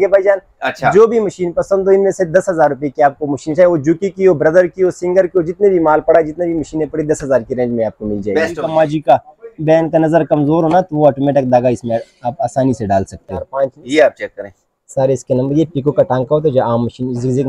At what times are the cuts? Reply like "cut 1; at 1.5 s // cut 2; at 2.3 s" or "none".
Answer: cut 1; at 8.6 s // cut 2; at 13.5 s